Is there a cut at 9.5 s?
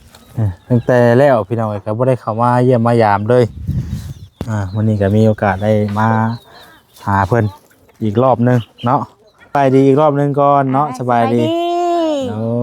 yes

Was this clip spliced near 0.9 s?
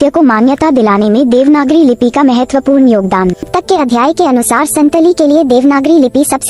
no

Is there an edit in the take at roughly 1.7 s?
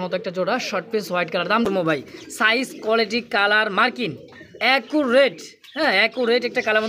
yes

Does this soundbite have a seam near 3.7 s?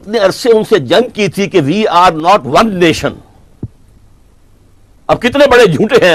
no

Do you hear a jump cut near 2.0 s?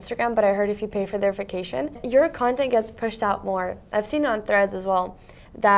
yes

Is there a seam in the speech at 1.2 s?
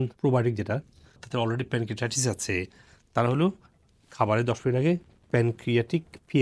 yes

